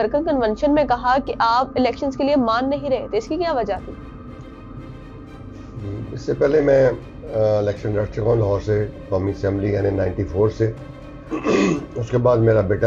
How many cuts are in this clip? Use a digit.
0